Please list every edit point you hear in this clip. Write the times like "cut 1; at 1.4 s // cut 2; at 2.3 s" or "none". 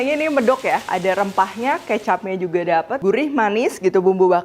cut 1; at 0.9 s